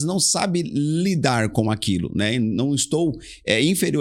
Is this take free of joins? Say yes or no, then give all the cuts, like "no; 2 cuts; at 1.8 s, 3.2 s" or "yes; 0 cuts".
yes; 0 cuts